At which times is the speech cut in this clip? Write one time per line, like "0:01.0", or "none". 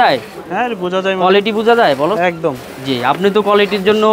none